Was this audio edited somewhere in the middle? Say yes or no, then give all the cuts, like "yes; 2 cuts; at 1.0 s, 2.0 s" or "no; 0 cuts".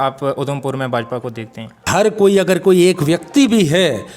yes; 1 cut; at 1.9 s